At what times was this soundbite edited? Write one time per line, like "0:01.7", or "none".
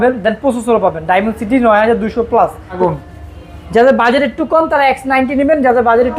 0:02.8